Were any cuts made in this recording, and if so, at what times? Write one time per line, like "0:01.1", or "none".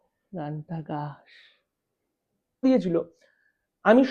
0:02.6